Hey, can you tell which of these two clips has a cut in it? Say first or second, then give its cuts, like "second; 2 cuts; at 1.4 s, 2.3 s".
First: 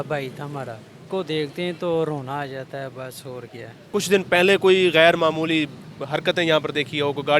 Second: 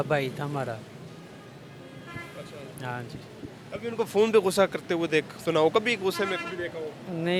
first; 2 cuts; at 1.1 s, 3.8 s